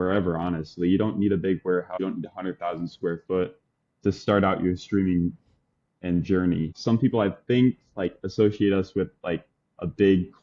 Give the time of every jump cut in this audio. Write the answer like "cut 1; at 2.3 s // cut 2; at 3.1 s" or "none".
cut 1; at 2.0 s // cut 2; at 6.7 s